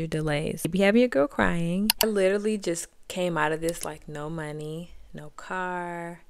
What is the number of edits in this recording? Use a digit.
2